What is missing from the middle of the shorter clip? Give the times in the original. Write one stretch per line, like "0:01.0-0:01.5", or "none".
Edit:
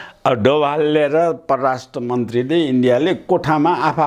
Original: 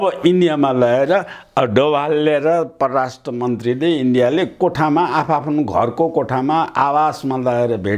none